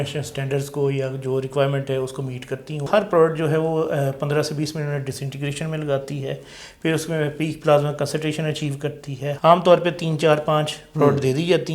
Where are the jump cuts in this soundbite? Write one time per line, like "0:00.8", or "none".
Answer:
0:02.9
0:09.4